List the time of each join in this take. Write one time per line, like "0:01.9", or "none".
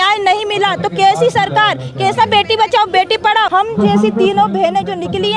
0:03.5